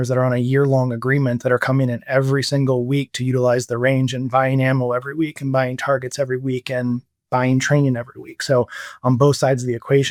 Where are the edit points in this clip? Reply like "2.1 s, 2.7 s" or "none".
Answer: none